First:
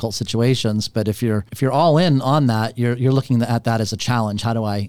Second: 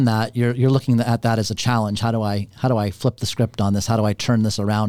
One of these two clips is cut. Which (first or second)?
first